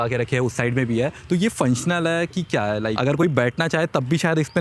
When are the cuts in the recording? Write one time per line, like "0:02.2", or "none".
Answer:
0:02.9